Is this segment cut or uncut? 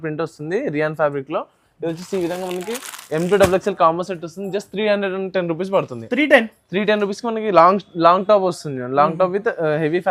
uncut